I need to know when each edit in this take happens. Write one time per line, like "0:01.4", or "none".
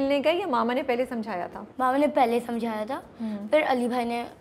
none